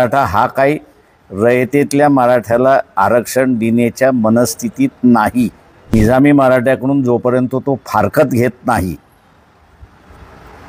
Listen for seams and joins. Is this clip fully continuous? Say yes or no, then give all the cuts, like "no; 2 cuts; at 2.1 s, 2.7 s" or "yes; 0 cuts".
no; 1 cut; at 5.9 s